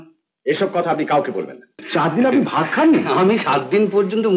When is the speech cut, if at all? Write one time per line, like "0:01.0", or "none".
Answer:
0:01.8

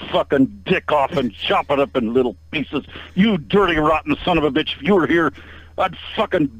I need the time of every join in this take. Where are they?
none

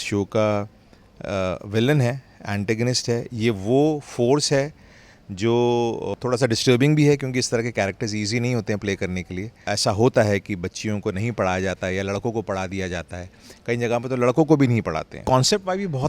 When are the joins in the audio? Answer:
0:06.1
0:09.6
0:15.2

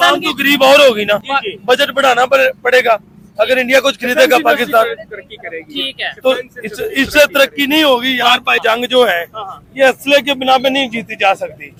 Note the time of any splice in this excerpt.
none

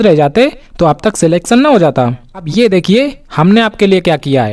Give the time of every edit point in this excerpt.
0:02.5

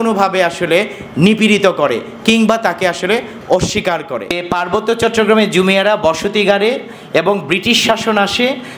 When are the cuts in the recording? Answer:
0:04.4

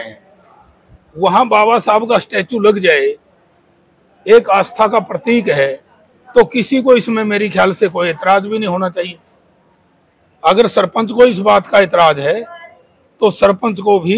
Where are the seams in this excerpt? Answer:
none

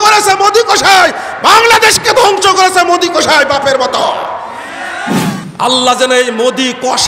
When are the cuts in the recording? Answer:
0:05.4

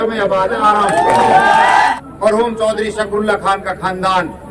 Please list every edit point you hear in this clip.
0:01.9

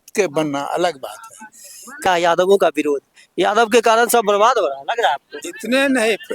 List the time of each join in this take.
0:02.1

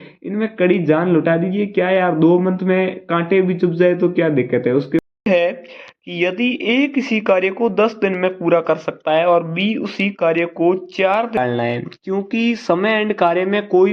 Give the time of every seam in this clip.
0:05.2
0:11.4

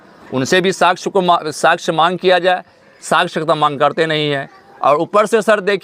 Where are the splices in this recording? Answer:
none

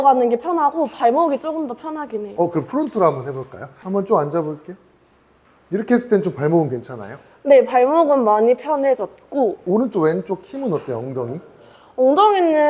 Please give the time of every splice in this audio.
none

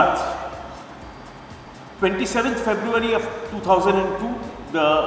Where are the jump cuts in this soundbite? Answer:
none

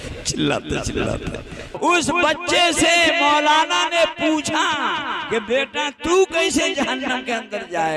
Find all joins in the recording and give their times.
0:01.8

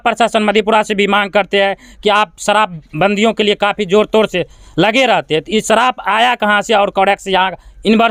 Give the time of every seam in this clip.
none

